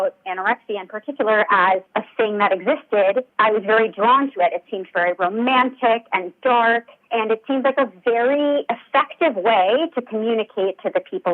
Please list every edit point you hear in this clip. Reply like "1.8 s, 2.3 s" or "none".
1.9 s